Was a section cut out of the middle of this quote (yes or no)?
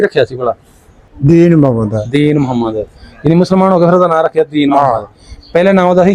yes